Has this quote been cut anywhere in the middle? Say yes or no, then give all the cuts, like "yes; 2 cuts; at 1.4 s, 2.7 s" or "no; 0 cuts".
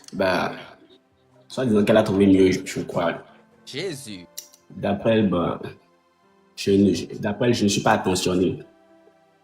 yes; 1 cut; at 4.2 s